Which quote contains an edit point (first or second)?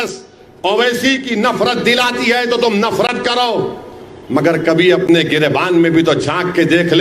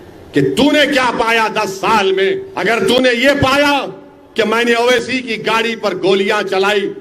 second